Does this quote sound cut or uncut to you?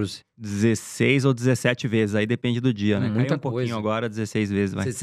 uncut